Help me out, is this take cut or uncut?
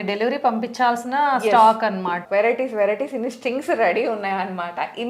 cut